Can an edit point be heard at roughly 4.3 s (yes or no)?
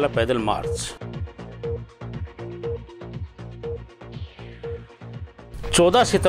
no